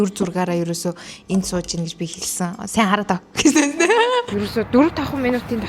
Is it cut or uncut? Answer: cut